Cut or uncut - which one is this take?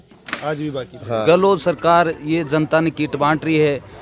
cut